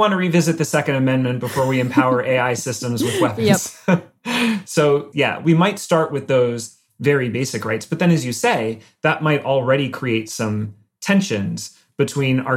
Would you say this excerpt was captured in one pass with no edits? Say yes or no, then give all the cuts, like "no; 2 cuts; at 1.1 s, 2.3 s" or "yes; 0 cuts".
no; 1 cut; at 5.1 s